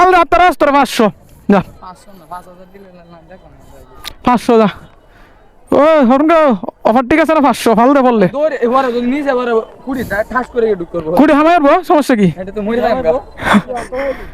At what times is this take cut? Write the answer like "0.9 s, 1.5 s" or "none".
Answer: none